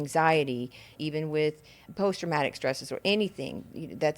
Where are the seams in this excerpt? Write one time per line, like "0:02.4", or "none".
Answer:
0:01.0
0:01.8